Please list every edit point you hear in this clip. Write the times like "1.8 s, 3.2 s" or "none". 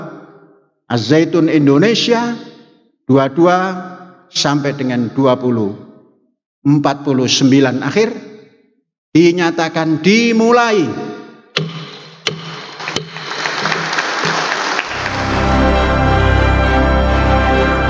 15.2 s

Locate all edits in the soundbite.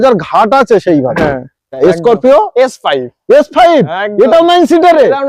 1.8 s

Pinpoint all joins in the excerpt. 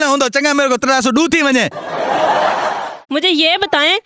none

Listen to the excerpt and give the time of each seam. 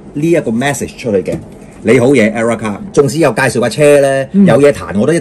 2.8 s

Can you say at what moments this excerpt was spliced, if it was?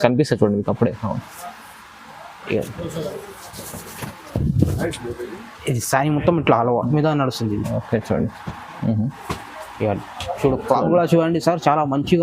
6.9 s

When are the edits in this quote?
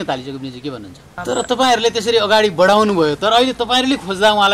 1.1 s

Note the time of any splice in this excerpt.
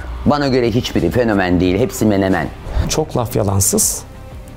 2.8 s

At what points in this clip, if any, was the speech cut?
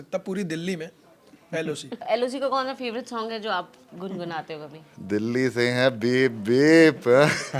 2.0 s

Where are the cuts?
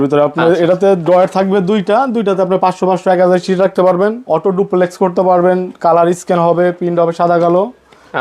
4.2 s

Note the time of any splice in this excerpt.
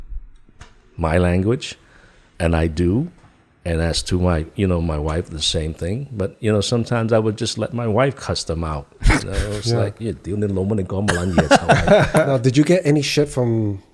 12.3 s

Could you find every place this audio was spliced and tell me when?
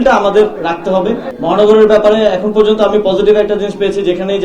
1.3 s

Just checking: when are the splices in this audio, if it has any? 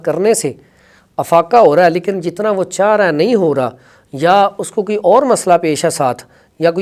none

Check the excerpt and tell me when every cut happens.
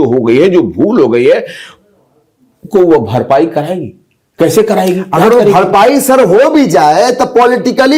none

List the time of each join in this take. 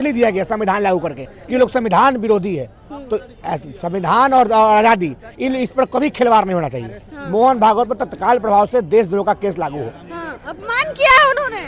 none

